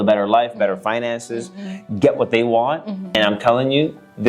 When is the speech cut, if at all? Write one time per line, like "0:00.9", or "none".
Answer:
0:03.2